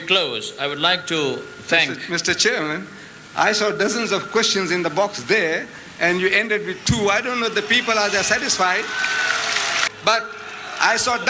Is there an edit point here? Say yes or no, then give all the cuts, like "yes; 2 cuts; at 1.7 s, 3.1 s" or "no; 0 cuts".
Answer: yes; 1 cut; at 9.8 s